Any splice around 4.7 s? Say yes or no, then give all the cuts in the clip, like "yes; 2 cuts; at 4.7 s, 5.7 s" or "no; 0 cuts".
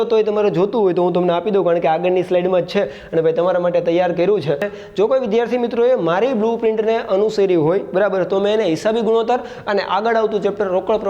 yes; 1 cut; at 4.7 s